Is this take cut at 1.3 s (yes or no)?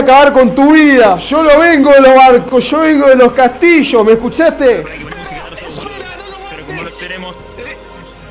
yes